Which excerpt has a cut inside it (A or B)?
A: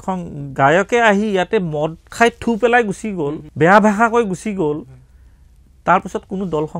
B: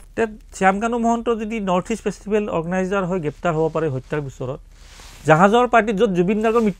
A